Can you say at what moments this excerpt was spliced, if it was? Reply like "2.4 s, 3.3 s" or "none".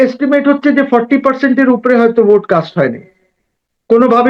none